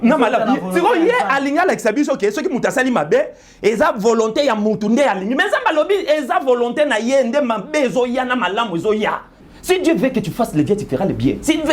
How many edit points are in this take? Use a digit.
1